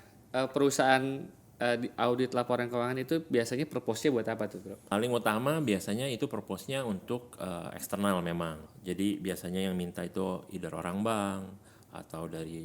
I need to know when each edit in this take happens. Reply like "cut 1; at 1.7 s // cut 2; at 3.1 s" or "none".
cut 1; at 4.8 s // cut 2; at 8.7 s